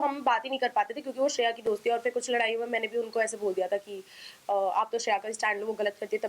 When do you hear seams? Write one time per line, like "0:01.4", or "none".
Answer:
none